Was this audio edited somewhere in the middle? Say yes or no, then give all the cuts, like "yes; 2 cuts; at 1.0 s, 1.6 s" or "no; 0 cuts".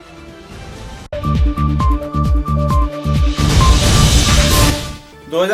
no; 0 cuts